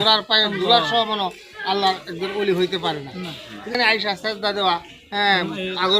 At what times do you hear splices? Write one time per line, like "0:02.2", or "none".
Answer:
0:03.8